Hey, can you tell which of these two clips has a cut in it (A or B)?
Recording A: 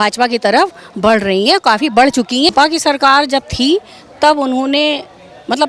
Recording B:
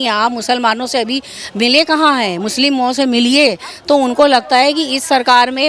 A